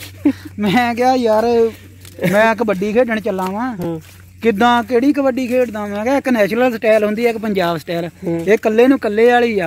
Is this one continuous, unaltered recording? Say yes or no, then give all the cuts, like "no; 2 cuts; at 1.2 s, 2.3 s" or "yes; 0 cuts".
yes; 0 cuts